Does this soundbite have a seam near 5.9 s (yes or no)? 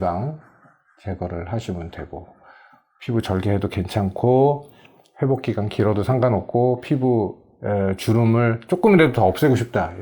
no